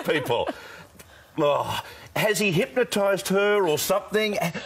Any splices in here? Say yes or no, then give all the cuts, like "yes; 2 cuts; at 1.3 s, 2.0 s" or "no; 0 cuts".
no; 0 cuts